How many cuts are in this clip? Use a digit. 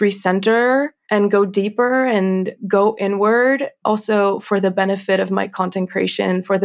3